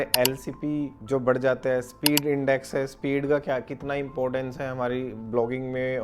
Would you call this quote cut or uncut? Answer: uncut